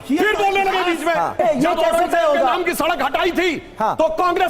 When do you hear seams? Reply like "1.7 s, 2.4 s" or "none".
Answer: 1.4 s

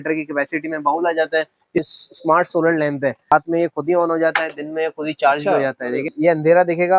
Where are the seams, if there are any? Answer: 1.8 s, 3.3 s, 6.1 s

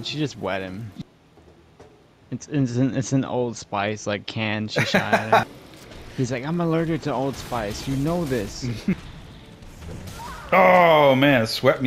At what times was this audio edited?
0.9 s, 5.5 s, 8.9 s

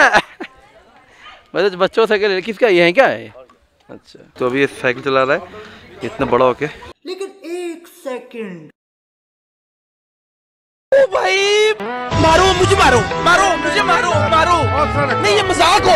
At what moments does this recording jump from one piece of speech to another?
none

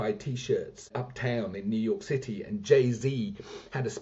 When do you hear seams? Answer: 0.9 s

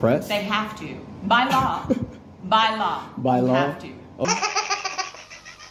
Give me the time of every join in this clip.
none

